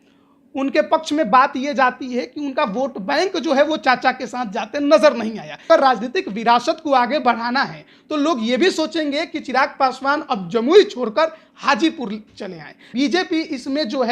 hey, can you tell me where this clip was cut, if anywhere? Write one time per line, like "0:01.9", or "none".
0:05.7
0:12.8